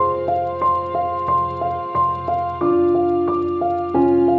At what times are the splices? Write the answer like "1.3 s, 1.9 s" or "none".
none